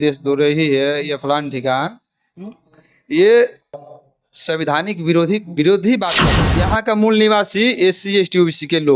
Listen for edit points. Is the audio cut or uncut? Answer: cut